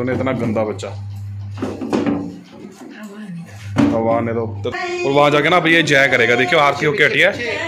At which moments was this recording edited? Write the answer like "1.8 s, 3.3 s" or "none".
4.6 s

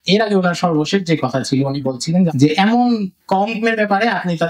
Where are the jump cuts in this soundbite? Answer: 2.3 s, 3.1 s

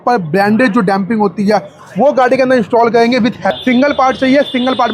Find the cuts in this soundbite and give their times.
3.5 s

